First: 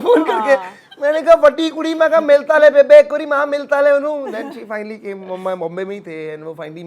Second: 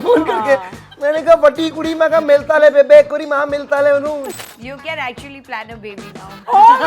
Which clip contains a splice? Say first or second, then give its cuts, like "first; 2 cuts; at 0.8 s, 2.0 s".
second; 1 cut; at 4.3 s